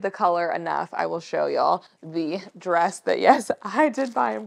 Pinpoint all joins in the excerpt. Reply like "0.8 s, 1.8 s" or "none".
none